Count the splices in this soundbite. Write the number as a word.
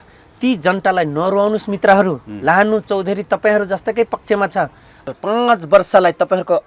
one